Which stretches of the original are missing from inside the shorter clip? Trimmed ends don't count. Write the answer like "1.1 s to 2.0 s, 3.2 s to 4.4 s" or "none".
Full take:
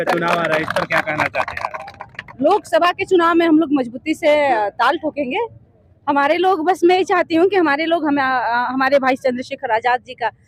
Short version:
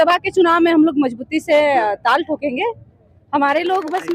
none